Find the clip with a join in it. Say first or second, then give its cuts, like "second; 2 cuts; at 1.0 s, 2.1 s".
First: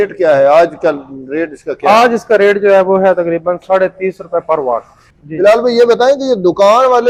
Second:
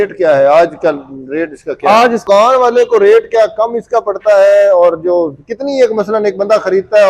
second; 1 cut; at 2.2 s